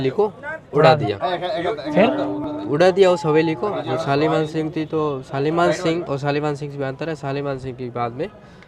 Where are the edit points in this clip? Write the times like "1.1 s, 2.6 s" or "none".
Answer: none

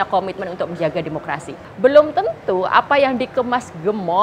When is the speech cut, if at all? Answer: 1.7 s

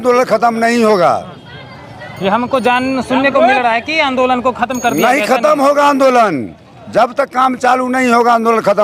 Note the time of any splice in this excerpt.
none

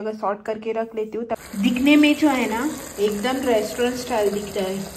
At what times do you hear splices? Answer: 1.4 s

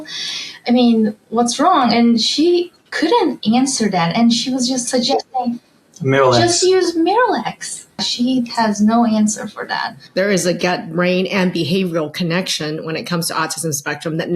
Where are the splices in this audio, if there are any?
8.0 s, 10.0 s

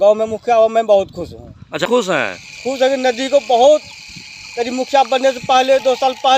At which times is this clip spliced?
1.9 s

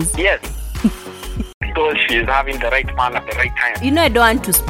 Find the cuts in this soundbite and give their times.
1.6 s

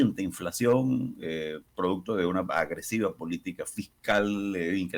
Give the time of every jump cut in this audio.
none

